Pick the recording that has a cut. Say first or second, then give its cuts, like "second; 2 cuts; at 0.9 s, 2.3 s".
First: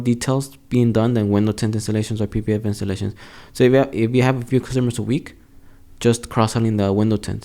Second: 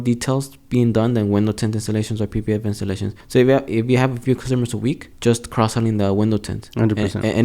second; 2 cuts; at 3.1 s, 5.1 s